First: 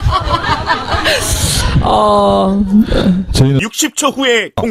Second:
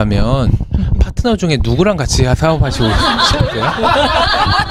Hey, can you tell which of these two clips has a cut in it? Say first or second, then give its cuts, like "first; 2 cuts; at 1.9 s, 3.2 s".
first; 1 cut; at 3.6 s